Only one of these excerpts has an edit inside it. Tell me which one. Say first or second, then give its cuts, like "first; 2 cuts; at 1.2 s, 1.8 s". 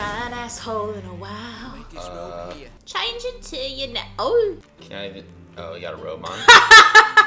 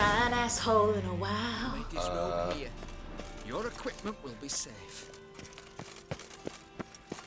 first; 2 cuts; at 2.7 s, 4.8 s